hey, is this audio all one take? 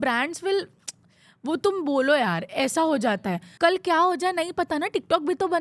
no; 1 cut; at 3.5 s

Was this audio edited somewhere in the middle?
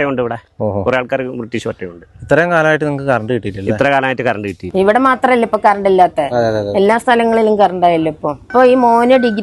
yes; 2 cuts; at 4.6 s, 8.5 s

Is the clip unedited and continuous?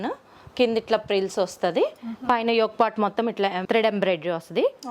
no; 1 cut; at 3.6 s

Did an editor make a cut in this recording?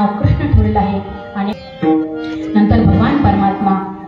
no; 0 cuts

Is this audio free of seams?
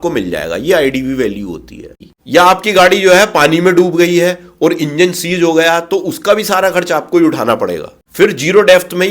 no; 1 cut; at 2.0 s

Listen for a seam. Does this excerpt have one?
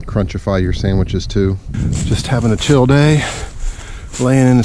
yes; 1 cut; at 1.7 s

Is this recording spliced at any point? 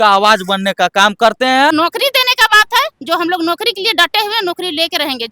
yes; 1 cut; at 1.7 s

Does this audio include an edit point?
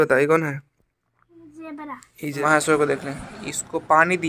yes; 1 cut; at 2.2 s

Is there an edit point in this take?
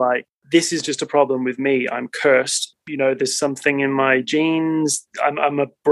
yes; 2 cuts; at 2.8 s, 5.0 s

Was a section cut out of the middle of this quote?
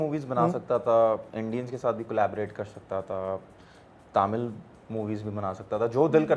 no; 0 cuts

